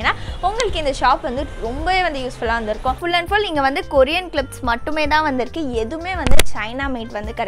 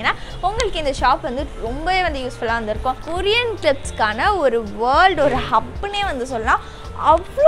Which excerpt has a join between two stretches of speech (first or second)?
first